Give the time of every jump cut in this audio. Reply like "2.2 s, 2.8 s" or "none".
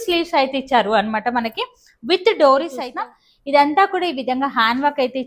2.8 s